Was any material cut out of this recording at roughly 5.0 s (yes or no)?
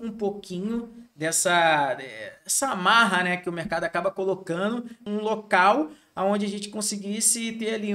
yes